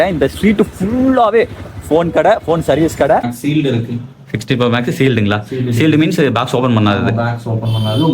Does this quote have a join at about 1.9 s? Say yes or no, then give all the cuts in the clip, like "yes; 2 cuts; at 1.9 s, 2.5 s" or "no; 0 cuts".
no; 1 cut; at 3.3 s